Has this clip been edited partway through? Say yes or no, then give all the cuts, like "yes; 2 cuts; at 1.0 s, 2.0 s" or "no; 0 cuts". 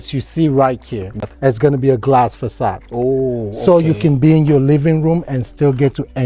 no; 0 cuts